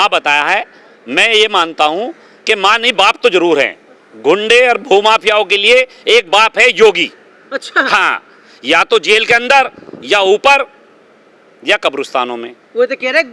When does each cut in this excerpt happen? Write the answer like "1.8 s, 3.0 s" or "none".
none